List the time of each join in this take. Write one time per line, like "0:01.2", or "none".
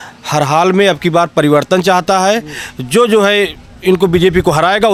none